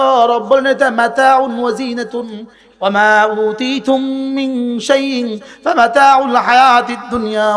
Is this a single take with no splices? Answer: yes; 0 cuts

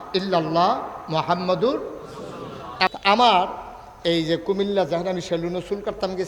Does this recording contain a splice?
yes; 1 cut; at 2.9 s

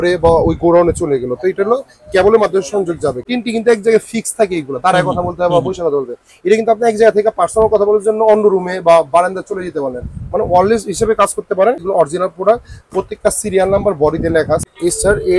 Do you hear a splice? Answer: yes; 3 cuts; at 3.2 s, 11.8 s, 14.6 s

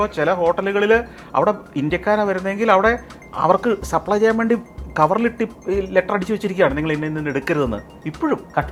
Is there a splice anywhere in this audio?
no; 0 cuts

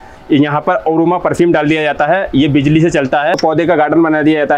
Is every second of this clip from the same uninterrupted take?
no; 1 cut; at 3.4 s

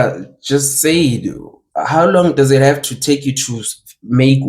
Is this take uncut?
yes; 0 cuts

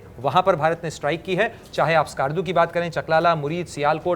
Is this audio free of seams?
yes; 0 cuts

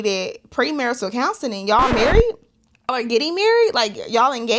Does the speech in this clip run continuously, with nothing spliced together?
no; 1 cut; at 2.9 s

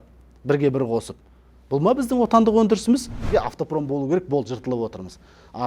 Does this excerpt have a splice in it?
yes; 1 cut; at 3.1 s

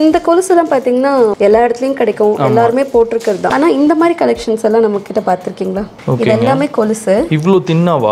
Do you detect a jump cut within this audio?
yes; 3 cuts; at 1.3 s, 3.5 s, 5.9 s

